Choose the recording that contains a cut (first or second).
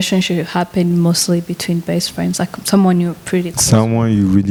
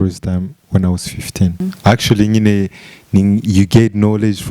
second